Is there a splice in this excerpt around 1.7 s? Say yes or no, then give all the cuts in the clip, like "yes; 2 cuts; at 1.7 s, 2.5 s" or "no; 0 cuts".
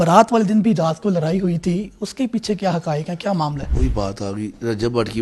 no; 1 cut; at 3.7 s